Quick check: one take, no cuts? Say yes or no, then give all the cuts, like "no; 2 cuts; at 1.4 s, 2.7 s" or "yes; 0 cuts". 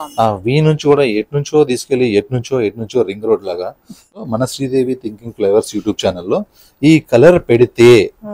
no; 1 cut; at 4.3 s